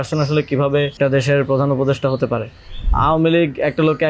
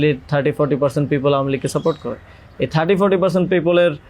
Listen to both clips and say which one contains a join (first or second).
first